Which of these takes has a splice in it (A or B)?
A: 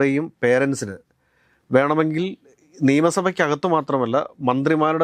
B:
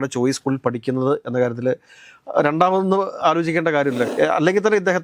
B